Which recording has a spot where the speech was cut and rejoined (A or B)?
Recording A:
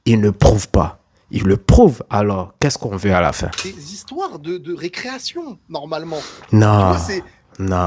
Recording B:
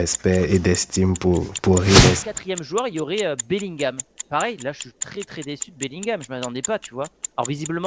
B